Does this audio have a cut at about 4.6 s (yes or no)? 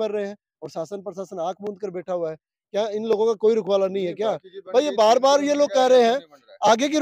no